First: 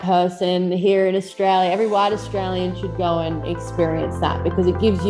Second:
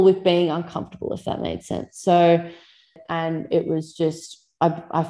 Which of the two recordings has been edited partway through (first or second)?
second